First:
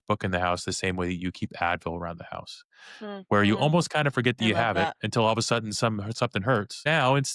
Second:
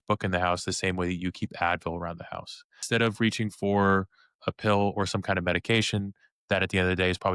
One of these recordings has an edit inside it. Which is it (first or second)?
second